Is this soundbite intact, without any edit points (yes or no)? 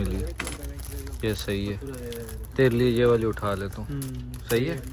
yes